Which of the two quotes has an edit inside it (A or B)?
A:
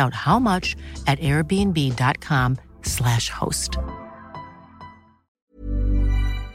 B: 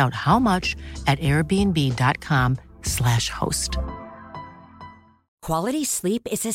A